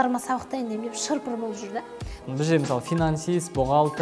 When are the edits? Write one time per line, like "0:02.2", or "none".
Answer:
0:02.2